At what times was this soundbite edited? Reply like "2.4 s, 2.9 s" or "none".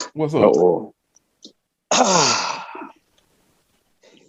none